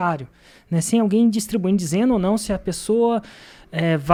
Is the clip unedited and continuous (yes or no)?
yes